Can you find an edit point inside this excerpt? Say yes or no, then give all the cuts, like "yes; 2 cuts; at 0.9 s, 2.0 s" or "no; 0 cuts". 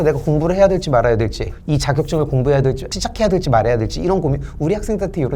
yes; 2 cuts; at 1.5 s, 2.9 s